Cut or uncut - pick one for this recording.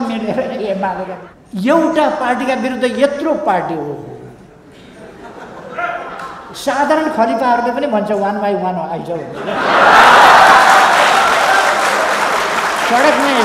cut